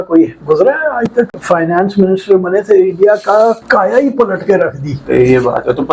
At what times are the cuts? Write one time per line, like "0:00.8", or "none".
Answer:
0:01.4
0:03.6
0:04.9